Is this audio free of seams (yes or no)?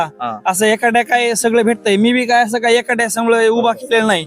yes